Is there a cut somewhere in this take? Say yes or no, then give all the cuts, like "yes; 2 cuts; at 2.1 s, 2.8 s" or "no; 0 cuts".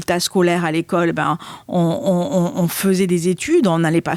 no; 0 cuts